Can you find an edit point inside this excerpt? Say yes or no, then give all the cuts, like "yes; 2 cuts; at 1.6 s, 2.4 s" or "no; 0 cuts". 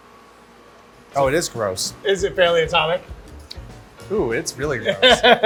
no; 0 cuts